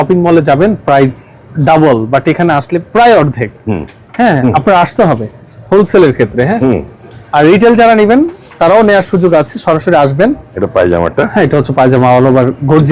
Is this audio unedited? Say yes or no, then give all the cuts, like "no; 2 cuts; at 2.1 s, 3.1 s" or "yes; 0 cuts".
yes; 0 cuts